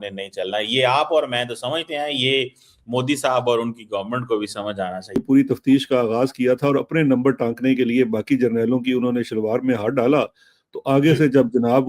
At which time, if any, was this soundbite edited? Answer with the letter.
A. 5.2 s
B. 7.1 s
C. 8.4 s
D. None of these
A